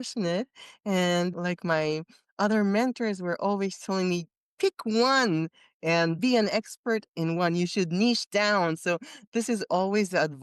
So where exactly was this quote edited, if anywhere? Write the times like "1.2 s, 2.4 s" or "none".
1.3 s, 6.2 s